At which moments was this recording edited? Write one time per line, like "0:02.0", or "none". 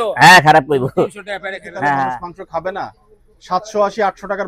0:02.2